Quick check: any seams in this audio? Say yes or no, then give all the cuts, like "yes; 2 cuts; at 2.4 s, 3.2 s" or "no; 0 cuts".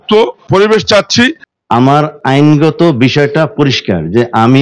yes; 1 cut; at 1.5 s